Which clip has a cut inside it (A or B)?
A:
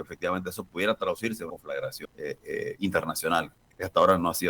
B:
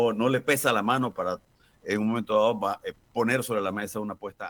A